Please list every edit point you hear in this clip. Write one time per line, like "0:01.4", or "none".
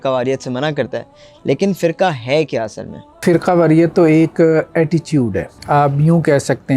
0:03.2
0:05.5